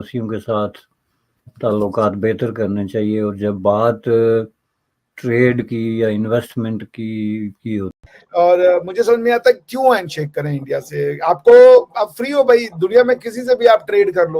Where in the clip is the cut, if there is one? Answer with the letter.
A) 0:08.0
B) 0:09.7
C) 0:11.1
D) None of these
A